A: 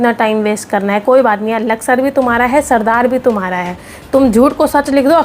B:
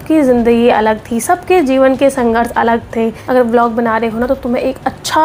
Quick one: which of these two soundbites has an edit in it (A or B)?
B